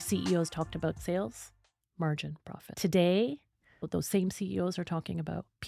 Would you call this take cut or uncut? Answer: cut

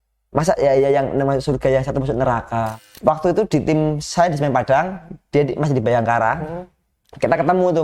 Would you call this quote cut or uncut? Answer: cut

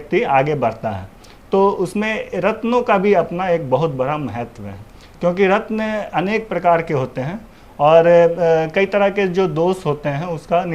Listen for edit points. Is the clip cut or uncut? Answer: uncut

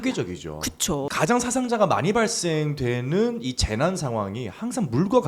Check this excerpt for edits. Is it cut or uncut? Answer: cut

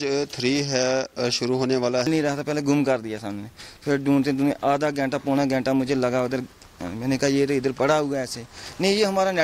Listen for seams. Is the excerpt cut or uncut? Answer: cut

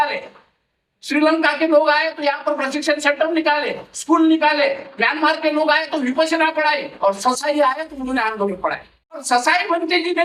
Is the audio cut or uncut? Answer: cut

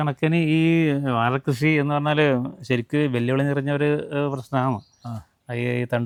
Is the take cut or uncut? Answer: uncut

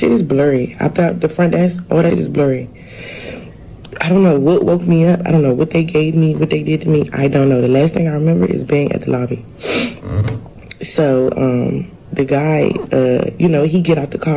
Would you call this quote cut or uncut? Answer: cut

